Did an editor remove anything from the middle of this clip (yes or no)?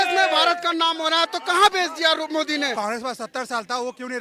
yes